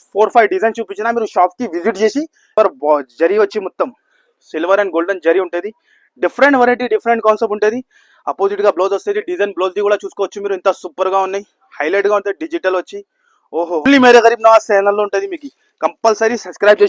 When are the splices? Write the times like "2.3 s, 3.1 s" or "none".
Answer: 2.5 s, 13.9 s